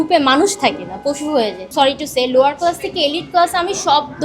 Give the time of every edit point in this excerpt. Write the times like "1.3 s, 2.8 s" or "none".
1.6 s